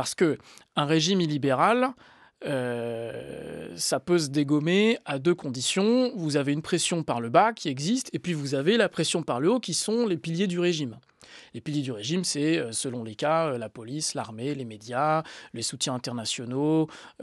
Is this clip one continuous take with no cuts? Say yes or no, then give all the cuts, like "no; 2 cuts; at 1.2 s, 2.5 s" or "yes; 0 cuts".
yes; 0 cuts